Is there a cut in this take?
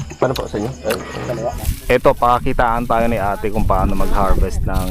yes; 1 cut; at 1.5 s

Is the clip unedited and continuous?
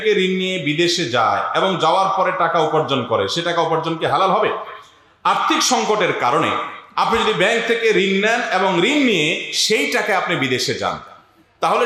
yes; 0 cuts

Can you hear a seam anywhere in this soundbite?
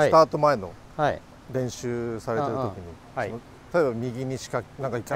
yes; 1 cut; at 3.5 s

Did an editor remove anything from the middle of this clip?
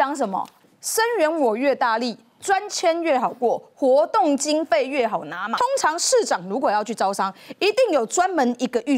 yes; 1 cut; at 5.5 s

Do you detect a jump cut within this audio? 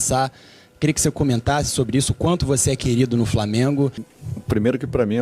yes; 1 cut; at 4.1 s

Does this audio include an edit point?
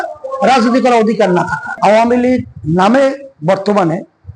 yes; 1 cut; at 1.6 s

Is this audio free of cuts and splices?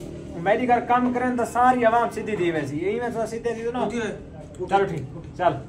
yes; 0 cuts

